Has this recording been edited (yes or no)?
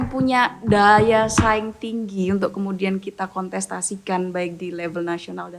no